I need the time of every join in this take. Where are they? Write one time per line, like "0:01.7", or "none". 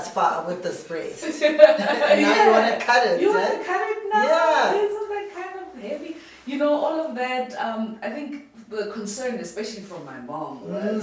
none

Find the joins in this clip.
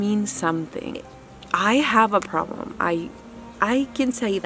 0:01.1

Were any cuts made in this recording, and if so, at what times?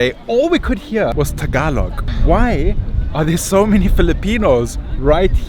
0:01.1
0:02.1

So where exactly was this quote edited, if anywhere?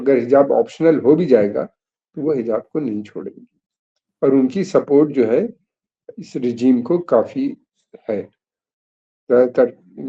none

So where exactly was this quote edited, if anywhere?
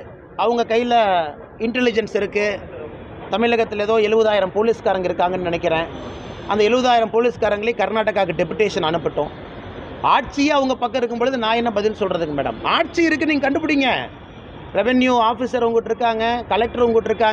none

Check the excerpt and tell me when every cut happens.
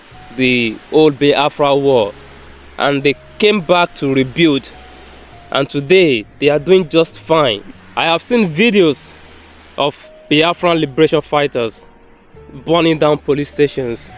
0:07.6

